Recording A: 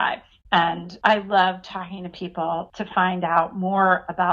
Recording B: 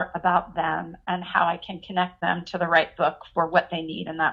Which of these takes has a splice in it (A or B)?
A